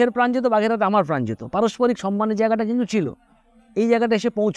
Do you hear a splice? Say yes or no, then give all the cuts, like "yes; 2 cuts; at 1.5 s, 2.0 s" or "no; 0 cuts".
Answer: no; 0 cuts